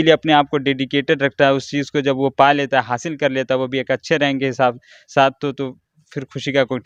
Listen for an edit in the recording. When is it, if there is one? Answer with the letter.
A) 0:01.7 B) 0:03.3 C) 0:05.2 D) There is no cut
D